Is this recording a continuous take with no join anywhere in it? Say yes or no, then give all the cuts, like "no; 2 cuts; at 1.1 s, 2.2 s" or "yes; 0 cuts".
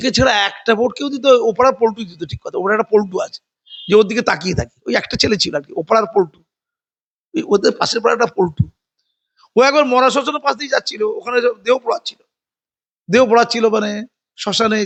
yes; 0 cuts